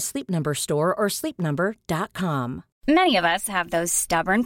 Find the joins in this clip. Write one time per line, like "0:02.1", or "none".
0:02.7